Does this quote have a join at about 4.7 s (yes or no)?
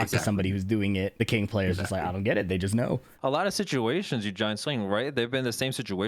no